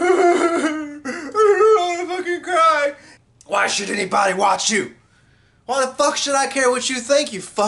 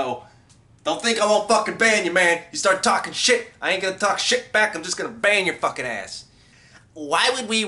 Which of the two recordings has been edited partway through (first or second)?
first